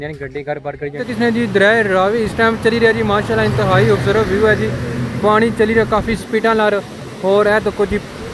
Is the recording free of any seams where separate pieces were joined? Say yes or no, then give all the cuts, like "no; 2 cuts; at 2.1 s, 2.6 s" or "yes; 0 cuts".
no; 1 cut; at 1.0 s